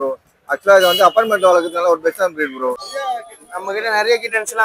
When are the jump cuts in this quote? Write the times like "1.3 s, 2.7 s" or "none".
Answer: 2.8 s